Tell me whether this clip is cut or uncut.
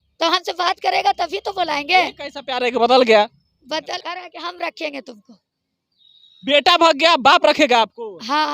cut